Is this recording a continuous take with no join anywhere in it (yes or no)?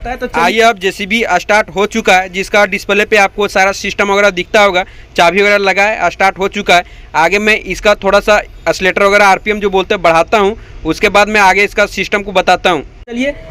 yes